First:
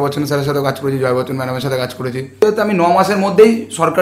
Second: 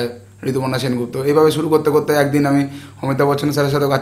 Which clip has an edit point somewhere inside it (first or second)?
first